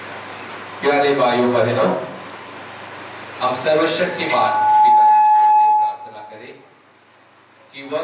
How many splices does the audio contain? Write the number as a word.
zero